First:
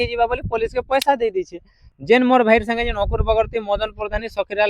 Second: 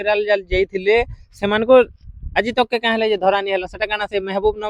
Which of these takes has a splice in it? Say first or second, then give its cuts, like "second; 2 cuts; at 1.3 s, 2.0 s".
first; 1 cut; at 1.9 s